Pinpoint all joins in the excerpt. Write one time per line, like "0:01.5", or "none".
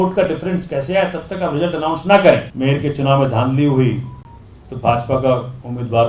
0:02.5